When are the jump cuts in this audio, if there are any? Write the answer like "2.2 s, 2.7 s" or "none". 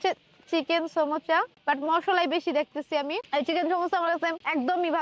none